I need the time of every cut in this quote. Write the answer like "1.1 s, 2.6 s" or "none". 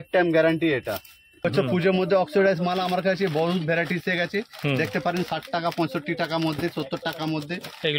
1.4 s